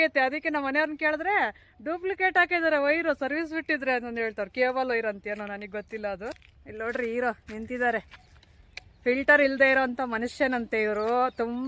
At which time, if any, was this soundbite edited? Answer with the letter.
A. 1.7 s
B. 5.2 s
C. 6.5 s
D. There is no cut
C